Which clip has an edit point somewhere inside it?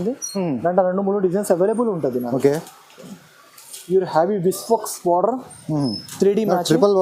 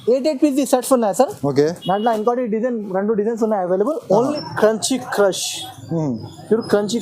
second; 1 cut; at 4.4 s

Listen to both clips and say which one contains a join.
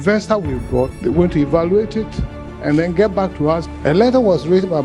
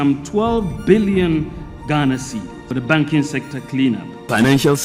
first; 2 cuts; at 0.9 s, 3.7 s

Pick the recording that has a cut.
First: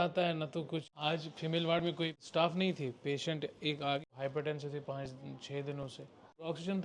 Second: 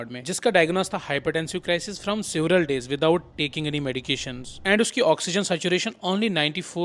first; 3 cuts; at 0.8 s, 2.2 s, 4.0 s

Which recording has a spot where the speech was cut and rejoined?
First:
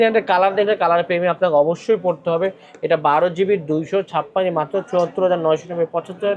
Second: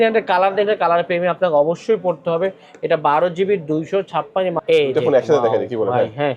second; 1 cut; at 4.6 s

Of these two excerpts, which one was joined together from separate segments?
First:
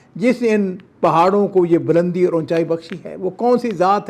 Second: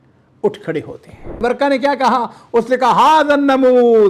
second; 1 cut; at 1.4 s

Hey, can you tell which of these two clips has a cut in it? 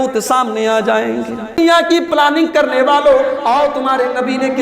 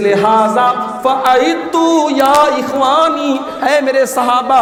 first; 1 cut; at 1.6 s

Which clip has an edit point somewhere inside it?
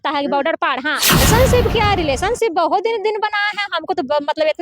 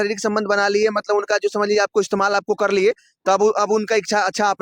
first; 1 cut; at 1.2 s

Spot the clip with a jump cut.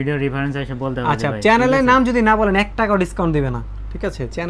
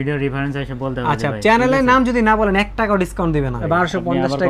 second; 1 cut; at 3.6 s

